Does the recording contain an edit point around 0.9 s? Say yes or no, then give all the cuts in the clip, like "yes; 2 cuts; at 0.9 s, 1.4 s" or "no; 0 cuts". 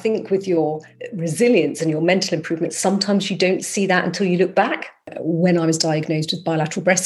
yes; 2 cuts; at 0.9 s, 5.1 s